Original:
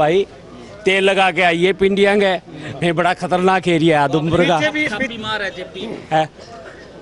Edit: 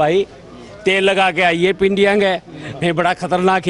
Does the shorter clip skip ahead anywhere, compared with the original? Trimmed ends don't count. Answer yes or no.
no